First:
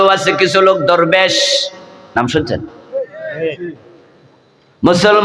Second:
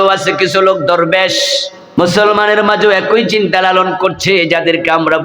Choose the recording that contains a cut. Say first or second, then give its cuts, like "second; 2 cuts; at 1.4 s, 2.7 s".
second; 1 cut; at 1.8 s